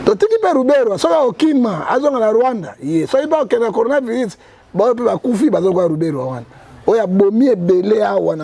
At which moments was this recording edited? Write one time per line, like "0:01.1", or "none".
none